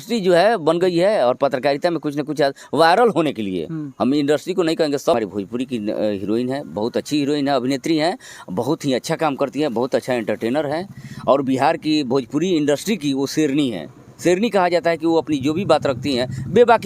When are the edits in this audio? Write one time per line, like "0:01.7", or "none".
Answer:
0:05.2